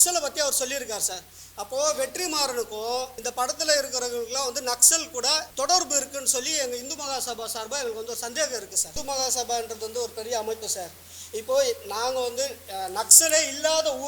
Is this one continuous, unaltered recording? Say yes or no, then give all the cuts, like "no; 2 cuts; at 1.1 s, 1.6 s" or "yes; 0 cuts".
no; 3 cuts; at 3.2 s, 5.5 s, 9.0 s